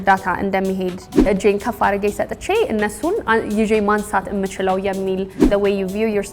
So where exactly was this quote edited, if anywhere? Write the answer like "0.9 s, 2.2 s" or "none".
1.3 s, 5.4 s